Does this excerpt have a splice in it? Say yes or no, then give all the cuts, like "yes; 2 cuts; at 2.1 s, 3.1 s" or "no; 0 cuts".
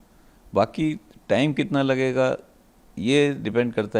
no; 0 cuts